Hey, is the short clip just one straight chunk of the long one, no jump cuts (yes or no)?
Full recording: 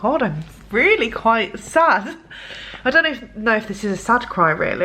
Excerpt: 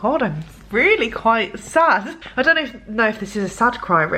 no